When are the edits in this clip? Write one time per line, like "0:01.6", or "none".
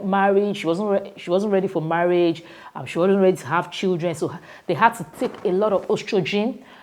0:05.1